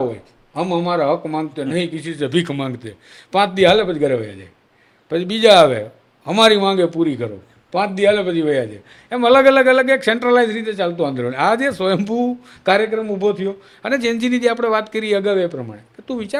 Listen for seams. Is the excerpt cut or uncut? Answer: uncut